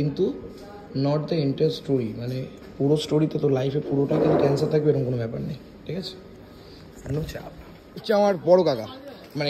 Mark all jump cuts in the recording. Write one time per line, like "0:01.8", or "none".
0:08.0